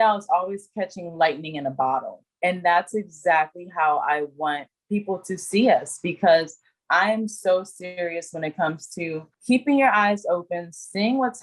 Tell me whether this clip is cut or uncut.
uncut